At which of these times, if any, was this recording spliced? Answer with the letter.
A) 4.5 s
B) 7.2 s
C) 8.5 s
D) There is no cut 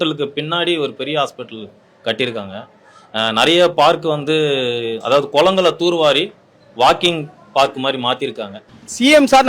C